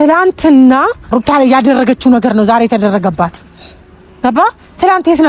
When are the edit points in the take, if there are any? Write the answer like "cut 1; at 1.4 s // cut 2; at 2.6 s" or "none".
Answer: cut 1; at 1.1 s